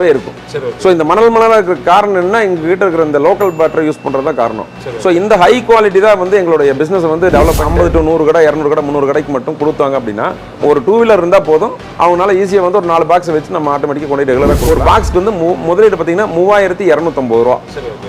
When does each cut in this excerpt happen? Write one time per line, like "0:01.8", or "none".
0:07.7
0:10.5
0:14.6